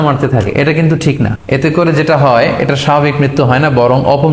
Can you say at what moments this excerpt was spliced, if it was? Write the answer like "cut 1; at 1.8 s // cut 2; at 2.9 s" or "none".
cut 1; at 1.4 s

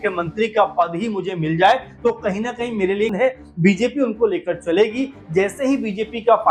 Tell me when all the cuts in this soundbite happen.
cut 1; at 3.1 s

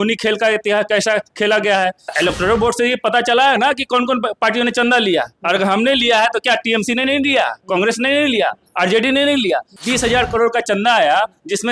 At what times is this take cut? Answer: cut 1; at 2.1 s // cut 2; at 9.8 s

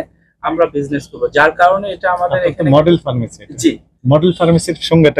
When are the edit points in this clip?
none

